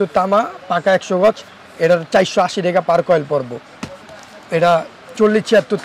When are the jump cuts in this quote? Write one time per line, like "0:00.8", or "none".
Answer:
none